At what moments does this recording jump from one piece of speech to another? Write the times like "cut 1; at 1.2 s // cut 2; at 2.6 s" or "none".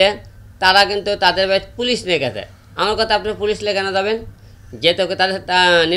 none